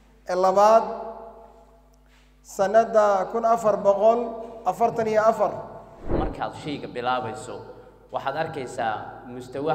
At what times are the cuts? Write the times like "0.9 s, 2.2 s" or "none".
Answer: 6.2 s